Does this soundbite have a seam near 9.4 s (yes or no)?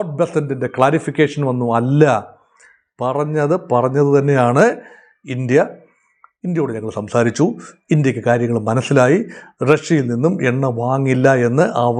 no